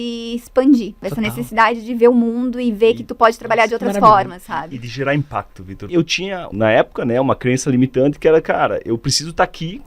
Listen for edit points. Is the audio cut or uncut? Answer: cut